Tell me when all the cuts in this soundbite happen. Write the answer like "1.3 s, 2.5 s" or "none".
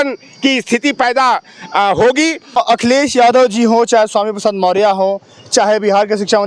2.6 s